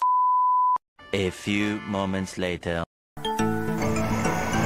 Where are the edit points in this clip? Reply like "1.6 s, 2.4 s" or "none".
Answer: 1.0 s, 3.2 s

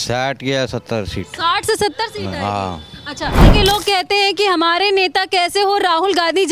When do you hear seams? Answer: 3.4 s

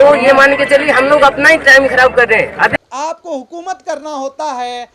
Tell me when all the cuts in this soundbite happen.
2.7 s

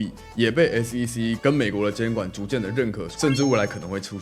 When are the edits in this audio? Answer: 3.1 s

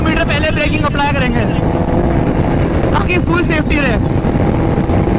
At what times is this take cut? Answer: none

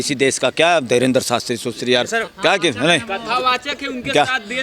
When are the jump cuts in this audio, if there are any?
none

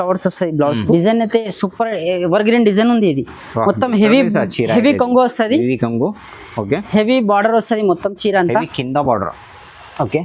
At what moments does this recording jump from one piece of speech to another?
0.9 s

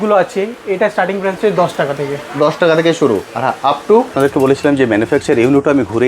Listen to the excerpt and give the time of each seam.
4.1 s

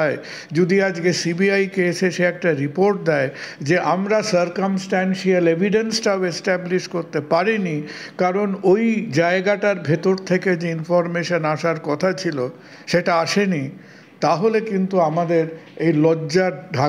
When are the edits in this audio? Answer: none

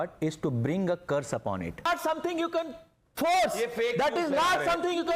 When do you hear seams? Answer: 1.9 s

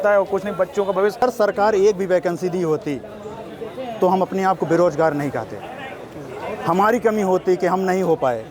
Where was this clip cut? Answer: 1.2 s

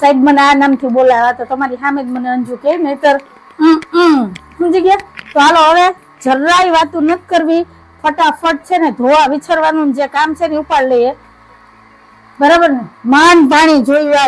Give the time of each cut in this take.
none

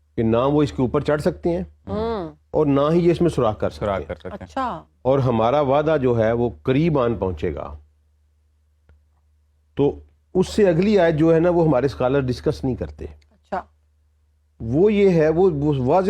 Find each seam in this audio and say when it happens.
4.9 s

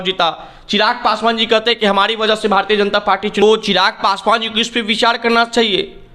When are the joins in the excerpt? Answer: 3.4 s

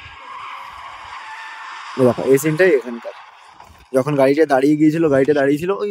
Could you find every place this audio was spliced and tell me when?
none

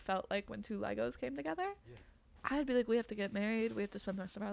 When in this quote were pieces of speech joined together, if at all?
none

